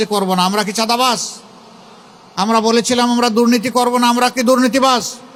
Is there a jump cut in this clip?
no; 0 cuts

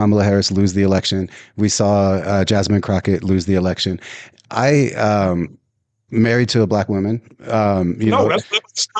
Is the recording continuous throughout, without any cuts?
yes; 0 cuts

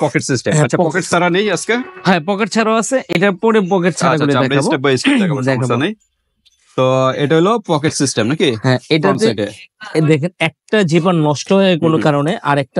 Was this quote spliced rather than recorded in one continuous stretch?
no; 0 cuts

